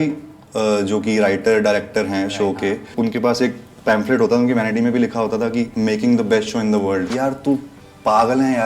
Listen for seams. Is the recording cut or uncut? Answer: cut